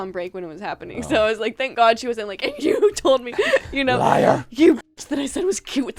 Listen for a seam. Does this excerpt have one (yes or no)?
no